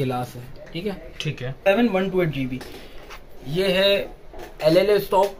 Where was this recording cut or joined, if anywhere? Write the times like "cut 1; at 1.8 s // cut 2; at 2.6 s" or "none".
cut 1; at 1.6 s